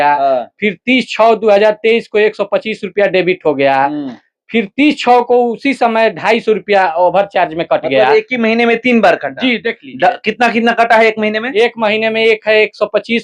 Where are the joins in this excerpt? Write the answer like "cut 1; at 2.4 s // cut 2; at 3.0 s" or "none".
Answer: none